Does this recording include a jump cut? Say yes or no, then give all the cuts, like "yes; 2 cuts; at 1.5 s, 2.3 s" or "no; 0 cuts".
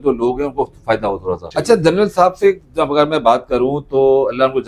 yes; 1 cut; at 1.4 s